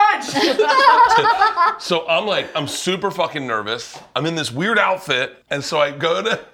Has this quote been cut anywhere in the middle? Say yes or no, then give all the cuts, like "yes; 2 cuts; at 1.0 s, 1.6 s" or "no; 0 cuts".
yes; 1 cut; at 5.4 s